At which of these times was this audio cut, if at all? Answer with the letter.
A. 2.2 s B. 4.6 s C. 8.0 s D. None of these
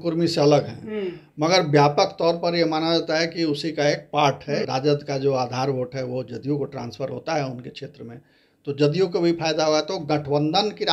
B